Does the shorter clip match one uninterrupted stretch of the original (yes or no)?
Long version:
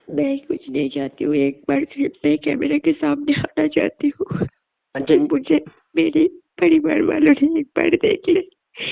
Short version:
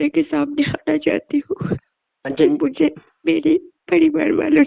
yes